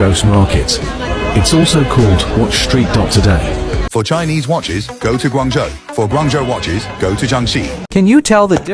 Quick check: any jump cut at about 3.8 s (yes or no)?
yes